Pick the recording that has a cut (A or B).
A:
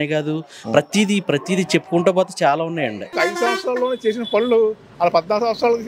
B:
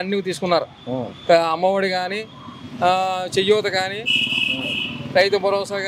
A